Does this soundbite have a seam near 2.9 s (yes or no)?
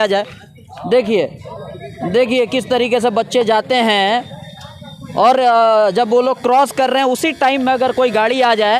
no